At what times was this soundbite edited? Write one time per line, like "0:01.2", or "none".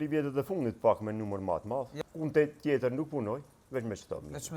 0:01.9